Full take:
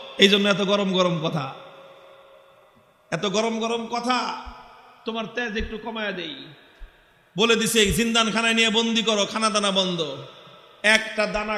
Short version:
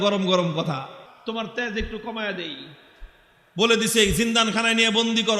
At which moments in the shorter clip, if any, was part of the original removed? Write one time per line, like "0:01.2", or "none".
0:01.0